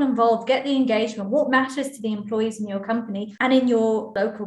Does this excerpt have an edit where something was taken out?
yes; 1 cut; at 3.3 s

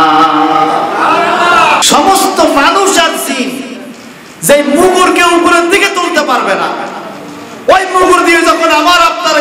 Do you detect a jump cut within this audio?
yes; 1 cut; at 1.8 s

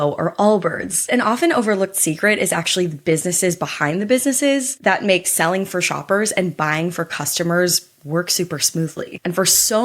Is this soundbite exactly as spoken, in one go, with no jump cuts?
no; 1 cut; at 1.1 s

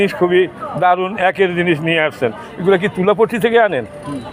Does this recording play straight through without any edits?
yes; 0 cuts

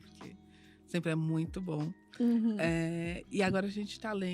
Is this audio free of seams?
yes; 0 cuts

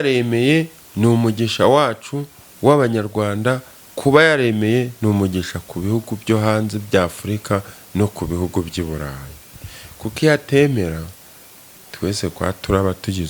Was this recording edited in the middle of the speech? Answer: no; 0 cuts

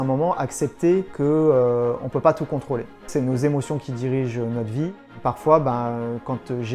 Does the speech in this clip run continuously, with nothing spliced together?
no; 3 cuts; at 1.1 s, 3.1 s, 5.1 s

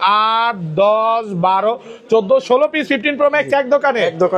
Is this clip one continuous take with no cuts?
yes; 0 cuts

